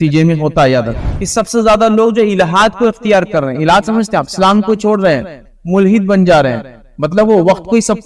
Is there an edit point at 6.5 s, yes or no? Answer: no